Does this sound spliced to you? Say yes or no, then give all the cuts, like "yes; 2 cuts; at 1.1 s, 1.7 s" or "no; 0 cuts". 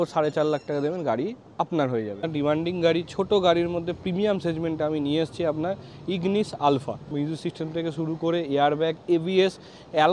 yes; 2 cuts; at 2.2 s, 7.0 s